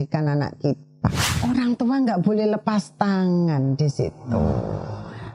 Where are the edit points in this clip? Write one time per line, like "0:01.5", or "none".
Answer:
0:01.3